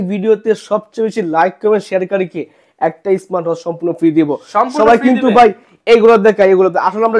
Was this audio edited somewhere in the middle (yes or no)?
no